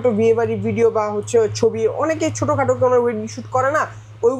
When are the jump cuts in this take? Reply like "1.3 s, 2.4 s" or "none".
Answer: none